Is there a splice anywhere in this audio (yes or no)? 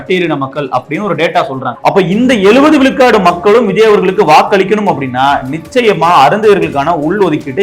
yes